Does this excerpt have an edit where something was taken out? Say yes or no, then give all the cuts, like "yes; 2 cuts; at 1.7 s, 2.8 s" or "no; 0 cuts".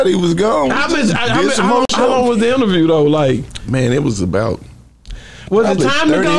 yes; 1 cut; at 0.9 s